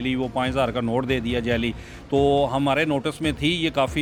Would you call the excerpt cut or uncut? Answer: uncut